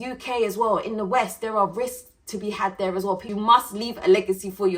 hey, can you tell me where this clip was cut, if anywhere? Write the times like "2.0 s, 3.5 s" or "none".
3.3 s